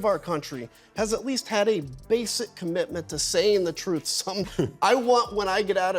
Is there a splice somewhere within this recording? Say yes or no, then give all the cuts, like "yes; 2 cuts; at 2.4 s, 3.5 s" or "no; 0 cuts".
yes; 1 cut; at 4.4 s